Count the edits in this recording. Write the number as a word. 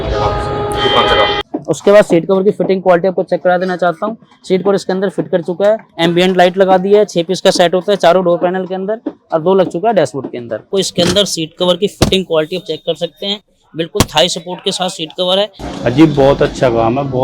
four